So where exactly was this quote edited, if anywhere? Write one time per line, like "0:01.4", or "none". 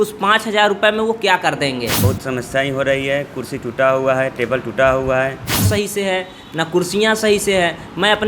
0:02.0
0:05.6

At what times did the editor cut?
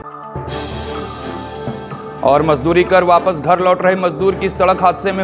none

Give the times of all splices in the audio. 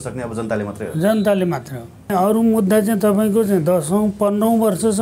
0:02.1

